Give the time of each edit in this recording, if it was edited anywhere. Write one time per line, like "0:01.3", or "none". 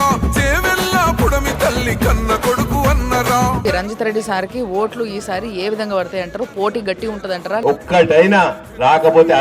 0:03.6
0:07.6